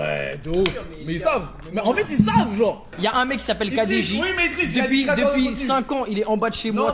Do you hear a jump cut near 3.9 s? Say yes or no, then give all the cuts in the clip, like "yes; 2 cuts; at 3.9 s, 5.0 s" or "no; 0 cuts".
yes; 1 cut; at 3.9 s